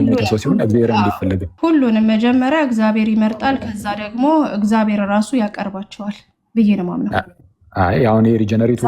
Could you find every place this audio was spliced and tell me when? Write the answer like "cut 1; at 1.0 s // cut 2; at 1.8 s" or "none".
cut 1; at 1.5 s

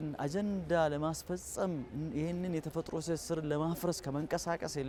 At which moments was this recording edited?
none

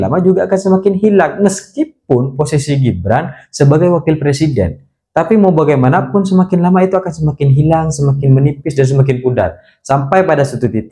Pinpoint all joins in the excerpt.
none

